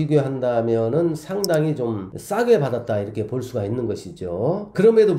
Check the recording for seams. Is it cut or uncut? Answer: uncut